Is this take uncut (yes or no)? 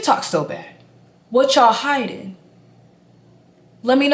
yes